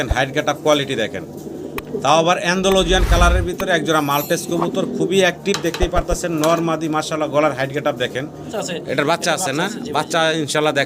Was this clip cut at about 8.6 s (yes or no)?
yes